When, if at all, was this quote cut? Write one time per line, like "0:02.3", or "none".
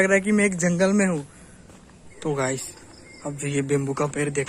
0:02.1